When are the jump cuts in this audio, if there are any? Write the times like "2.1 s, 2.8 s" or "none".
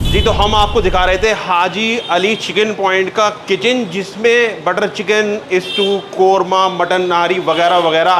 none